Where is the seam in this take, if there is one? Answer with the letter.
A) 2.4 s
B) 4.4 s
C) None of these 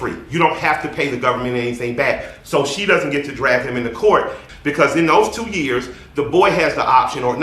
B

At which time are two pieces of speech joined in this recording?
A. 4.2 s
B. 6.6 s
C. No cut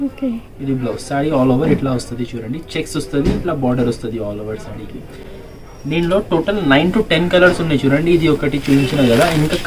C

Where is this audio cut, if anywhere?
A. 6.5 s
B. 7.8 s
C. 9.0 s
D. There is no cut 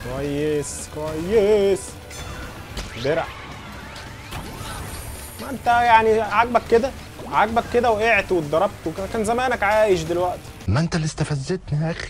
D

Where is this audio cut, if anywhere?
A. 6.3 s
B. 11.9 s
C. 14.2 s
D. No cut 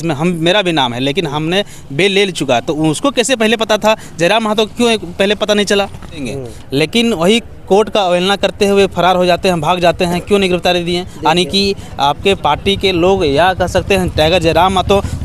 A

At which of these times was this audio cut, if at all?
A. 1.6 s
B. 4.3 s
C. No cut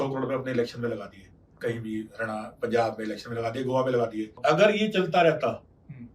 B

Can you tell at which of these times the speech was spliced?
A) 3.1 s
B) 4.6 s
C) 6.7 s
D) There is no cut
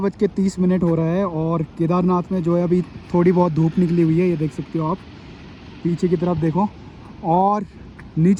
D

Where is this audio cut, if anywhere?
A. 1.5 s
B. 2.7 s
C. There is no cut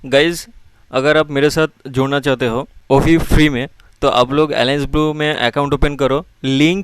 B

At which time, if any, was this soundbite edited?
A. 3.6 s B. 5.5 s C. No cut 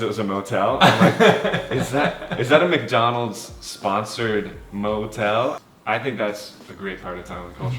B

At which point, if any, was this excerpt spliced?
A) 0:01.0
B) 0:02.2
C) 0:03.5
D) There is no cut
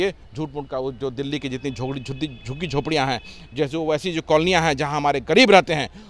D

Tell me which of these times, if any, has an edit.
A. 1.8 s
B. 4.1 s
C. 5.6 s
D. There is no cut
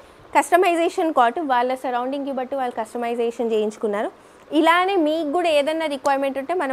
D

